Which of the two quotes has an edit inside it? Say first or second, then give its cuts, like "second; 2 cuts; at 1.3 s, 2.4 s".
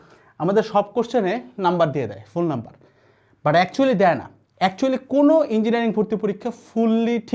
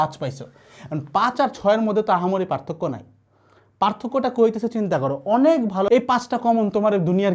second; 1 cut; at 5.9 s